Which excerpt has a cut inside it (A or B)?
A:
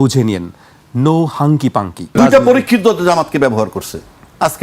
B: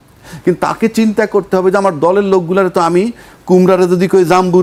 A